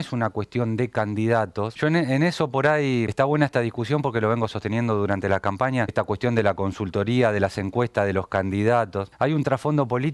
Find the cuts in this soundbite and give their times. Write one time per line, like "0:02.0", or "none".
0:01.7
0:03.1
0:05.9
0:09.0